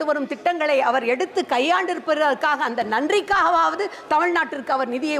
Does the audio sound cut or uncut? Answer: uncut